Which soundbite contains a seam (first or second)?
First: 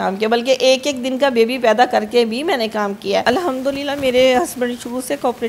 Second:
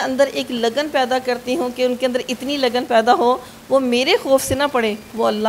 first